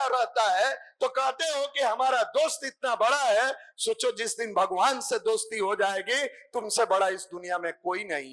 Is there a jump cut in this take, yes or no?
no